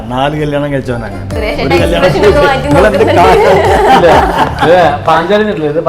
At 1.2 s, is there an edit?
yes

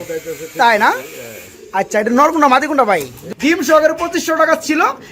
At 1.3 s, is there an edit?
no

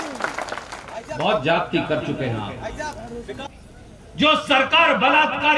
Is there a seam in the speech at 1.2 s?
no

